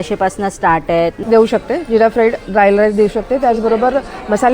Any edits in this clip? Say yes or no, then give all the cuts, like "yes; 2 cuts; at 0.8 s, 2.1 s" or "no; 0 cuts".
yes; 1 cut; at 1.2 s